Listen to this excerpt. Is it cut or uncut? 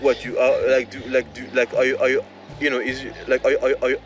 uncut